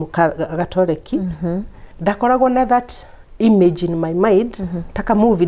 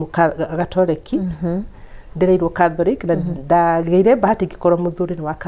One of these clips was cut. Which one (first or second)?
first